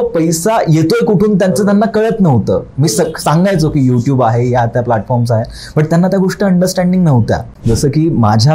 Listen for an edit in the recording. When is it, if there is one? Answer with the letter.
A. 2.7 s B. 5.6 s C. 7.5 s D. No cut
C